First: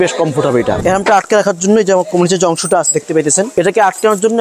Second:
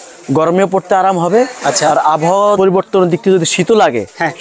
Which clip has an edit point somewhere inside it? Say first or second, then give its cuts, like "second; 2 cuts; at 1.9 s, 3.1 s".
first; 2 cuts; at 0.8 s, 3.5 s